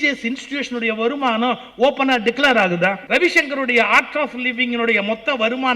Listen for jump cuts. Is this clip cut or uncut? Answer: cut